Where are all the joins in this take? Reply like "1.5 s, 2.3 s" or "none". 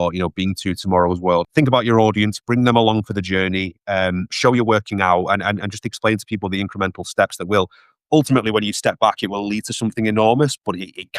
1.5 s